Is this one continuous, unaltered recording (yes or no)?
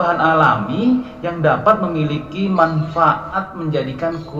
no